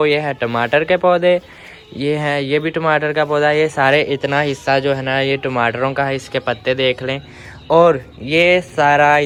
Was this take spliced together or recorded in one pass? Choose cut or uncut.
uncut